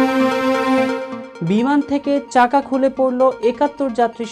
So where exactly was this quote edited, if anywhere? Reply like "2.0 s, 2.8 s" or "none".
1.2 s